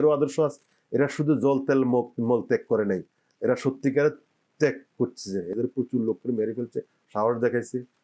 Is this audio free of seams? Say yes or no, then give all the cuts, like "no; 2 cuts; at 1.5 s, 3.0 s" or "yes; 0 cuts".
yes; 0 cuts